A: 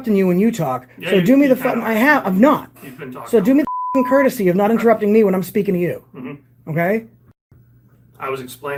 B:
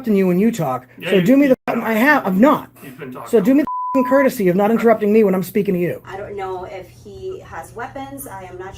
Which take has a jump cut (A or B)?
B